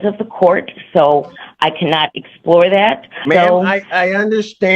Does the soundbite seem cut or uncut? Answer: cut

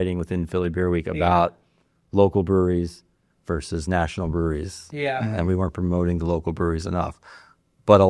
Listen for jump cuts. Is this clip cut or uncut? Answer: uncut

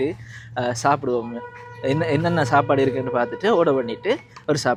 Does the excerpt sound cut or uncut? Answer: uncut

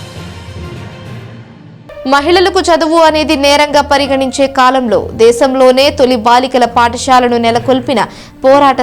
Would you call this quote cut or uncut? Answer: cut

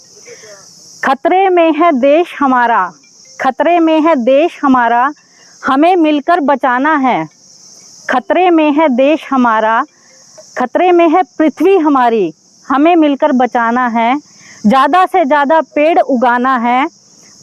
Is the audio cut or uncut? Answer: uncut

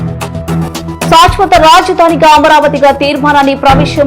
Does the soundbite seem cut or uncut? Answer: cut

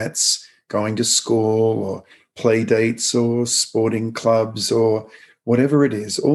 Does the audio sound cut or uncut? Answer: uncut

